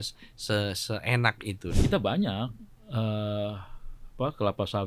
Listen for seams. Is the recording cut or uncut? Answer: cut